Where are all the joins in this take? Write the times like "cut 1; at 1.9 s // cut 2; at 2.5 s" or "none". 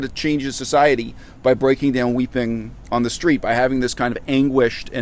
none